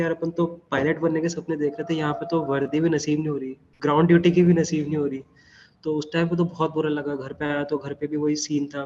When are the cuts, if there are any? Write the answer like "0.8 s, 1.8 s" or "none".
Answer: none